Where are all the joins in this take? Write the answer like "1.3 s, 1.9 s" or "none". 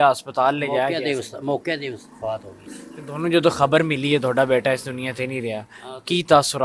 none